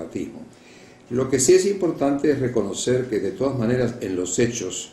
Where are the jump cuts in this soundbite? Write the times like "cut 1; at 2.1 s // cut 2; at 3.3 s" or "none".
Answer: none